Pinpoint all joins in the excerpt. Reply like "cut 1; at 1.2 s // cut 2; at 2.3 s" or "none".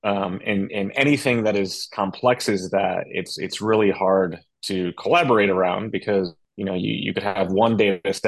cut 1; at 6.4 s